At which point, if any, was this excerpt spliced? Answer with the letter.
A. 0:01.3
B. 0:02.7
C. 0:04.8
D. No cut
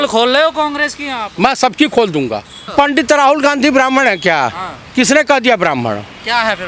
B